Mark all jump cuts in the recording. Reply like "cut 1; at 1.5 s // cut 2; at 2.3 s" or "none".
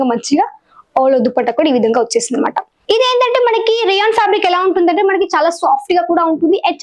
cut 1; at 2.7 s